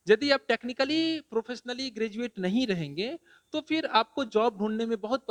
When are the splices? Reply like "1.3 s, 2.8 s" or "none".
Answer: none